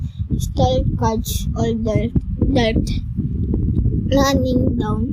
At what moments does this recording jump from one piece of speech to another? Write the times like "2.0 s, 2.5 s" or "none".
3.9 s